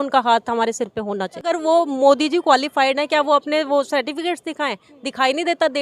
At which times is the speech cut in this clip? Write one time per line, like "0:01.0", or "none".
0:01.4